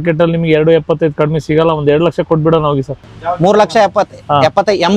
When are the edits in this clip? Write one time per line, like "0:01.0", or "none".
0:03.0